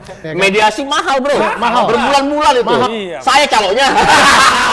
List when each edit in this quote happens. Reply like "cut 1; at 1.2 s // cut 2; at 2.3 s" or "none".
none